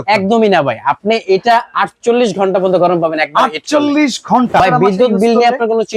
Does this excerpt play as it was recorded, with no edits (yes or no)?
no